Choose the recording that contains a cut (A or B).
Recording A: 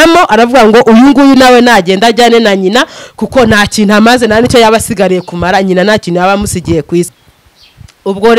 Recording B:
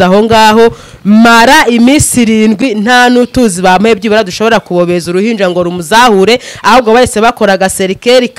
A